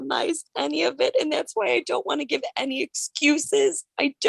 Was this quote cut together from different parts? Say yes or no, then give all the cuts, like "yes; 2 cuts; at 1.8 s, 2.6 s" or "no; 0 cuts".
no; 0 cuts